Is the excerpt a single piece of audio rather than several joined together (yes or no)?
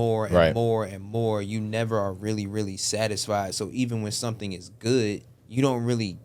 no